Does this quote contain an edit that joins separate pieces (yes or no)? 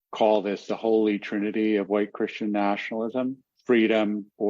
yes